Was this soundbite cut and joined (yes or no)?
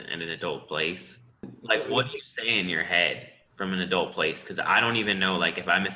yes